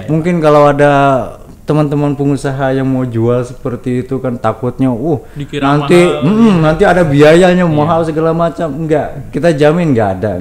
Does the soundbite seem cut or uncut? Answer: uncut